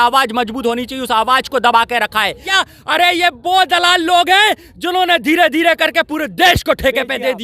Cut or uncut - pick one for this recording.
cut